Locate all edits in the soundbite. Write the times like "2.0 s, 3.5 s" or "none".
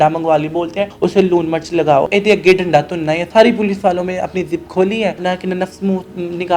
0.9 s, 2.1 s, 3.3 s, 5.2 s